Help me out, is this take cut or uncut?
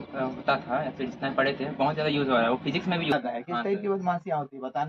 cut